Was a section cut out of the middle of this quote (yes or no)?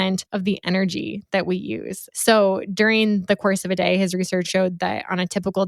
yes